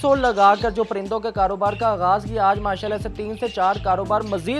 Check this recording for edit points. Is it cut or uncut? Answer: uncut